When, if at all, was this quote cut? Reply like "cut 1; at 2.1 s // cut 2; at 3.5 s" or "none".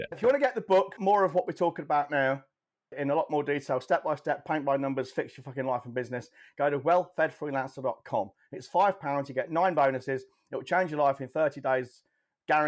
cut 1; at 0.9 s // cut 2; at 2.9 s